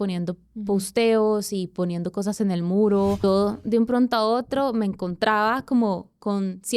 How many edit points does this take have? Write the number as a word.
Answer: one